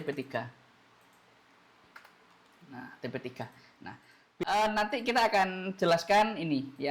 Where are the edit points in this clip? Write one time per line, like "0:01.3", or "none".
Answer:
0:04.4